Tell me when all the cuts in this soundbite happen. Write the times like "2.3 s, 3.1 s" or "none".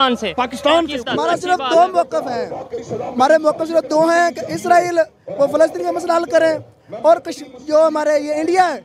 1.0 s